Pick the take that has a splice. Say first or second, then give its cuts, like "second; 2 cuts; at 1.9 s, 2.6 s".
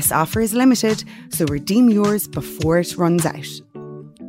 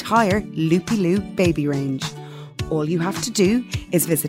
first; 1 cut; at 3.3 s